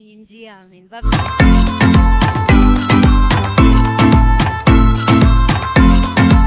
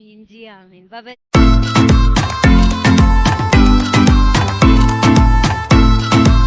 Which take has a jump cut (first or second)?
first